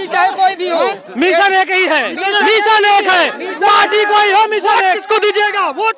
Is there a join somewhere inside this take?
no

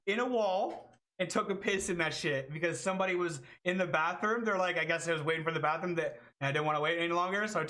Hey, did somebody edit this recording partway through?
no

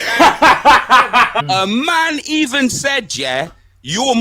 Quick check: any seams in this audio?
yes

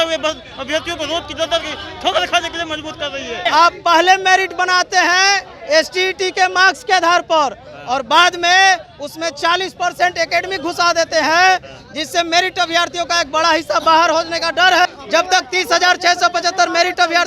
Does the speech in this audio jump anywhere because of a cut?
yes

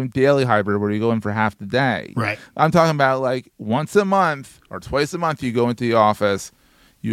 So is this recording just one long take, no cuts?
yes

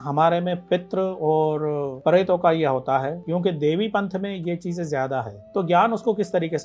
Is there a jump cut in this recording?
yes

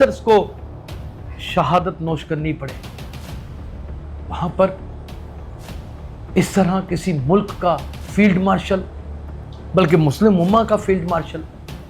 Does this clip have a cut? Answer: no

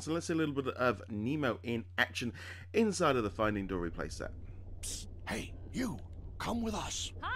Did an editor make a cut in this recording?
no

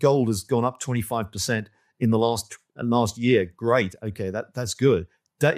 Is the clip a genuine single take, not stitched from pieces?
yes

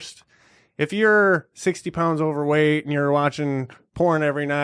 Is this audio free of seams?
yes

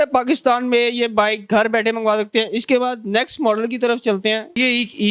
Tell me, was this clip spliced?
no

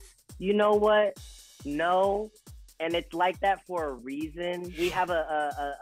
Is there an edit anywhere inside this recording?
yes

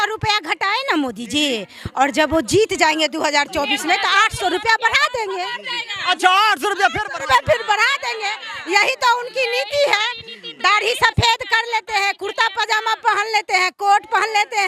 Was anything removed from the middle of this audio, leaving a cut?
no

